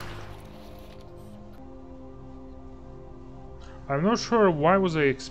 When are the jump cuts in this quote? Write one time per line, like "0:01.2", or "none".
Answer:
0:01.6